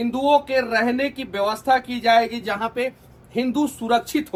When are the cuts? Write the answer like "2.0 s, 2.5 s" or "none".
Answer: none